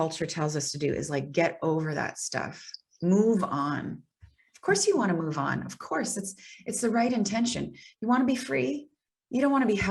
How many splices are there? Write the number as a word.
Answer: zero